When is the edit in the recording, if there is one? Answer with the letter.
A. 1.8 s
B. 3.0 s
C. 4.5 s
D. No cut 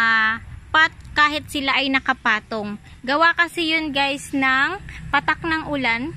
A